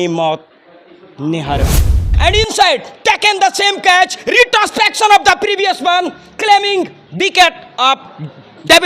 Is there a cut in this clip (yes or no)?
yes